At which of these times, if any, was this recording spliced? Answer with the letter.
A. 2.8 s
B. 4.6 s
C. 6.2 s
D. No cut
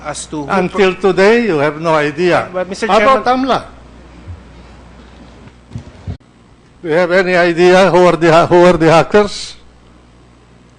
D